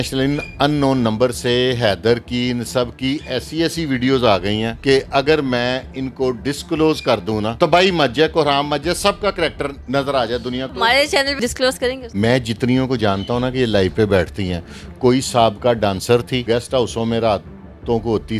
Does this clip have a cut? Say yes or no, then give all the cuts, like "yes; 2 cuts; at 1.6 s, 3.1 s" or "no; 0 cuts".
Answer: yes; 6 cuts; at 4.7 s, 7.5 s, 9.8 s, 10.7 s, 12.0 s, 16.4 s